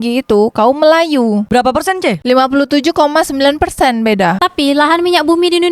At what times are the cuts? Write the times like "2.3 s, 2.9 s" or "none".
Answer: 4.4 s